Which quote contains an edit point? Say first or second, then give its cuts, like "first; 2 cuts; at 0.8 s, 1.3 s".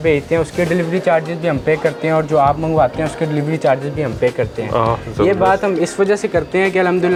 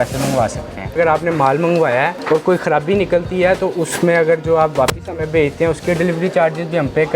second; 2 cuts; at 1.0 s, 2.2 s